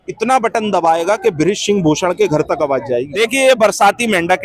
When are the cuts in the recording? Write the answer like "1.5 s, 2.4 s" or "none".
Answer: 3.1 s